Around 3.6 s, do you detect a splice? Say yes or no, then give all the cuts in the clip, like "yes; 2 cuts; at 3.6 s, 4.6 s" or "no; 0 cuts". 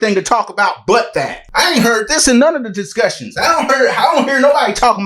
no; 1 cut; at 1.4 s